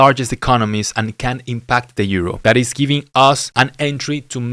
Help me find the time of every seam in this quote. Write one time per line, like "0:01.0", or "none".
0:02.4